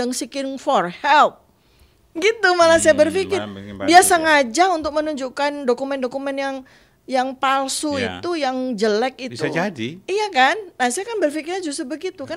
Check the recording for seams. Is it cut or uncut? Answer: uncut